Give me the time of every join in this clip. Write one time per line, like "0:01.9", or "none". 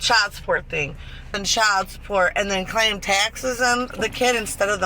0:01.3